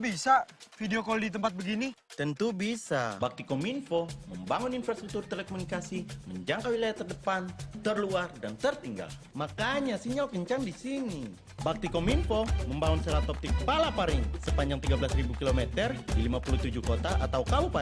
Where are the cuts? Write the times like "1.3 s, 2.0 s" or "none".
none